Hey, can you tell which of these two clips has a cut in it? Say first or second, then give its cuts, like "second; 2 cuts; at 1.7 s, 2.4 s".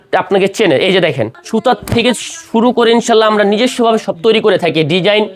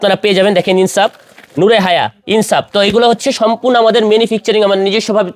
first; 1 cut; at 1.3 s